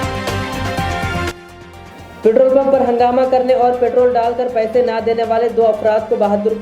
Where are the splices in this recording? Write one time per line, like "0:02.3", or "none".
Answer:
0:00.9
0:01.3